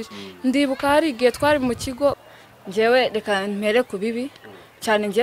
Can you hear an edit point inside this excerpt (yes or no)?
yes